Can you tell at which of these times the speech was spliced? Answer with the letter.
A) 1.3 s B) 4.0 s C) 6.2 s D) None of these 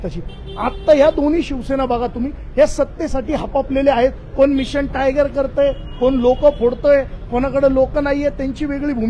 D